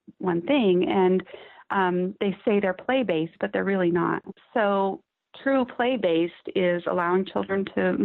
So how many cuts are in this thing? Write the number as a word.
two